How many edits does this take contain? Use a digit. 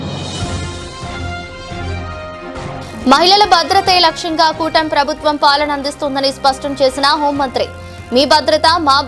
1